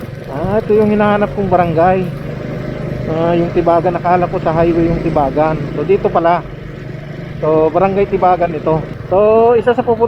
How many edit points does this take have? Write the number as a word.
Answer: one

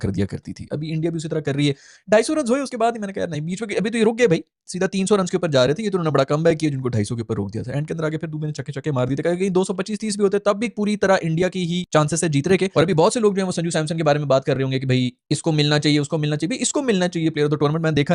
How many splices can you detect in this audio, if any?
zero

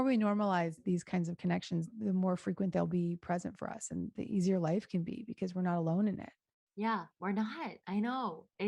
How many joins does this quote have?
two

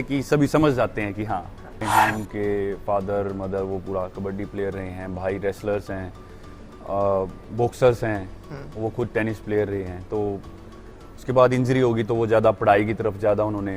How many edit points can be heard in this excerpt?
one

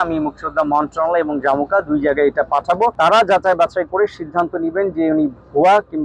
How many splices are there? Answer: one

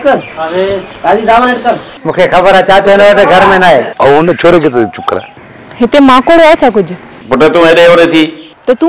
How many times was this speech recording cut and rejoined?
one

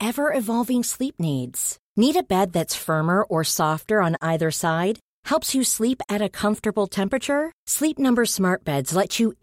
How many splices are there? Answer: zero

